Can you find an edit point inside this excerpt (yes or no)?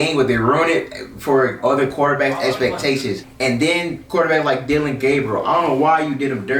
yes